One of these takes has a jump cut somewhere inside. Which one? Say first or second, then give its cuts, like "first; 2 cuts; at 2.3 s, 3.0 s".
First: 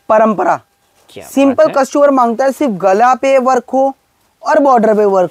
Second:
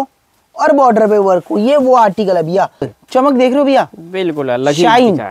second; 1 cut; at 3.0 s